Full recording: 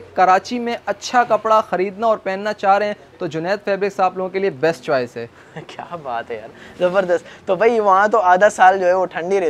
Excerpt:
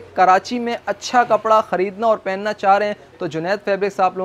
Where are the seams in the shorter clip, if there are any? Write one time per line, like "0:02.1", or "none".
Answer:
none